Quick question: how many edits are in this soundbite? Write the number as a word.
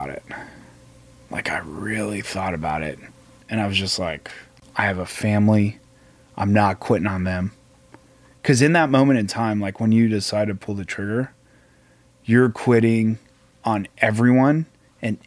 two